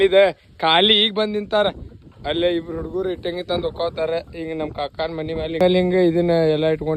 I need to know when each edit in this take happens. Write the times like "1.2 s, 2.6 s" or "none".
none